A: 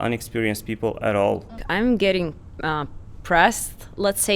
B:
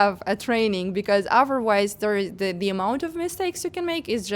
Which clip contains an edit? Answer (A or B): A